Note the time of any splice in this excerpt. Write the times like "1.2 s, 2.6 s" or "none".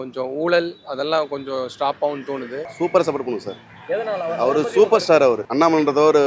2.6 s, 5.5 s